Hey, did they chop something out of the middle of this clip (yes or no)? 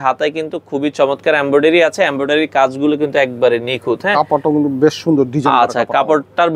no